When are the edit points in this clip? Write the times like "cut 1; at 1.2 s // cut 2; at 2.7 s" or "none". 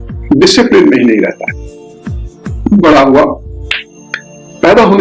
none